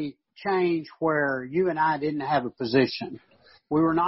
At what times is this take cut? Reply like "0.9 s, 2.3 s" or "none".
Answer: none